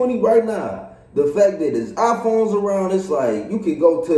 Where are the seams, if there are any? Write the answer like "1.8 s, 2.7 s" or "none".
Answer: none